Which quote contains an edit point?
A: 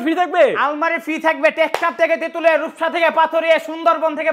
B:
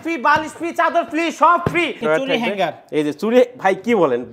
B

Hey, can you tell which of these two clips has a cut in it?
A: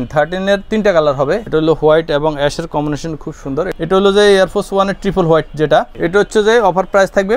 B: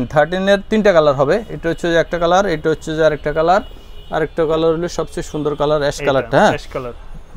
A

